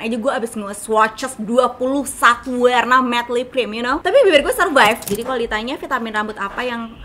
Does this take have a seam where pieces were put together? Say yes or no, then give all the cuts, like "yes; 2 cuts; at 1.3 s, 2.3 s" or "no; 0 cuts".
yes; 1 cut; at 5.0 s